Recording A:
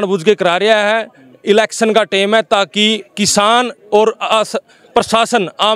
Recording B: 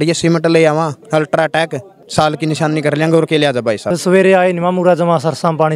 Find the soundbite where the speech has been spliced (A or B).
B